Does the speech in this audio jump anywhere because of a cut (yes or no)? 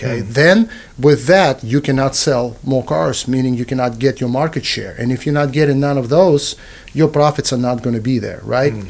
no